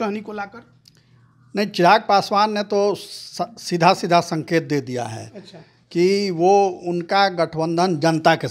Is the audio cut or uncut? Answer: uncut